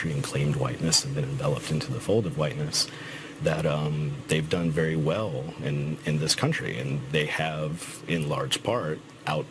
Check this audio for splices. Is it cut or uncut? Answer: cut